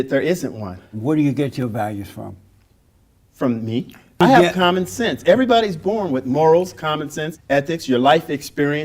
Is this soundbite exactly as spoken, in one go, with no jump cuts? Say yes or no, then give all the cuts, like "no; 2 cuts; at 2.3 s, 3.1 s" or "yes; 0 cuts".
no; 1 cut; at 4.2 s